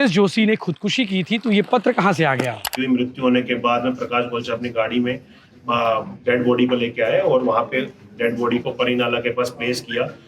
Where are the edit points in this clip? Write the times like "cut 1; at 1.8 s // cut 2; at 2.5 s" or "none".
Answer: cut 1; at 2.7 s